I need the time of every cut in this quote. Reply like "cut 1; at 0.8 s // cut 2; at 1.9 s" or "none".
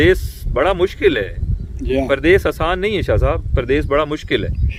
none